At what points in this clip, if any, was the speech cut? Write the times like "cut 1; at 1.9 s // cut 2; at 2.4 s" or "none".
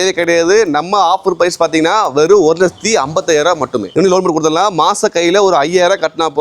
cut 1; at 3.9 s

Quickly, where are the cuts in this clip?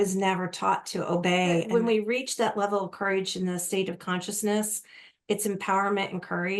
cut 1; at 1.7 s

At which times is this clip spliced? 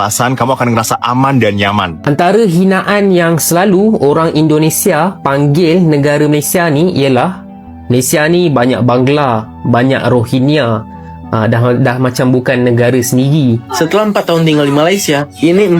cut 1; at 1.9 s // cut 2; at 13.7 s

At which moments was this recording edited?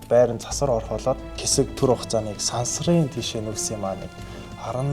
cut 1; at 1.4 s

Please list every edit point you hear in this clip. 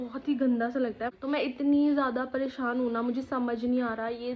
cut 1; at 1.0 s

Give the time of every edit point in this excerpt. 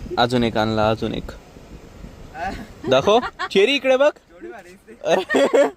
none

